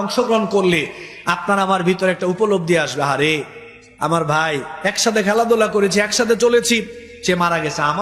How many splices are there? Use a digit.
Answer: 0